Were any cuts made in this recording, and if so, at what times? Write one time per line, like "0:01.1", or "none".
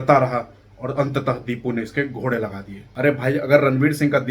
0:02.8